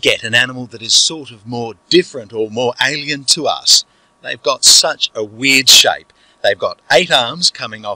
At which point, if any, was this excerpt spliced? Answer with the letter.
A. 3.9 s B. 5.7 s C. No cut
B